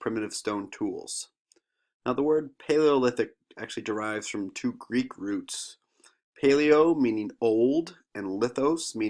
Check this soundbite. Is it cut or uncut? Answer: cut